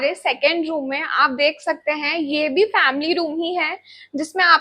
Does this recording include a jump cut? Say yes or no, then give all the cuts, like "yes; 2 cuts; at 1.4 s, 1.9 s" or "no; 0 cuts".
no; 0 cuts